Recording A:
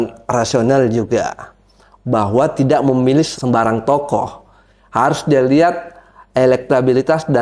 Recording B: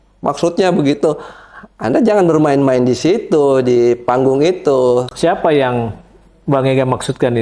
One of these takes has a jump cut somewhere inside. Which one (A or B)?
A